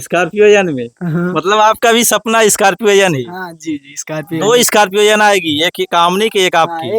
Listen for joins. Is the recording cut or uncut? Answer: uncut